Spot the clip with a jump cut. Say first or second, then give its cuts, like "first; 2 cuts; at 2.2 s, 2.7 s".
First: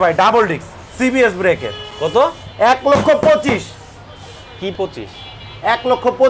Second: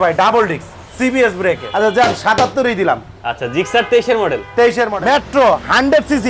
second; 2 cuts; at 1.7 s, 4.8 s